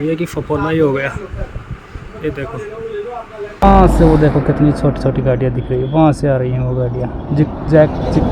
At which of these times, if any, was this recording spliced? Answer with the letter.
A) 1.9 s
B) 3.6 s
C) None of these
B